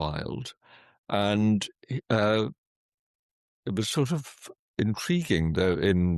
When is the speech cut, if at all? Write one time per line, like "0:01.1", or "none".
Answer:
none